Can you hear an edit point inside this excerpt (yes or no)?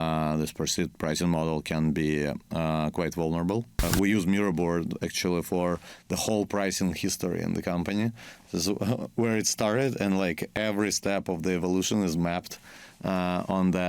yes